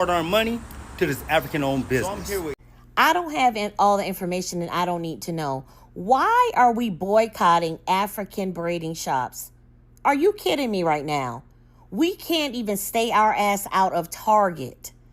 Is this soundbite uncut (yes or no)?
no